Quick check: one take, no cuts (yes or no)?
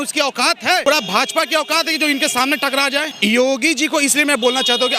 no